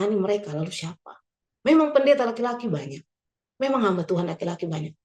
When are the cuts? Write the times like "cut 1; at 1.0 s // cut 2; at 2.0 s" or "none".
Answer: cut 1; at 1.4 s